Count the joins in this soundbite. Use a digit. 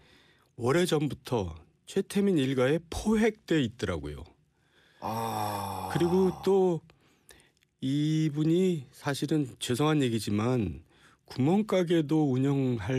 1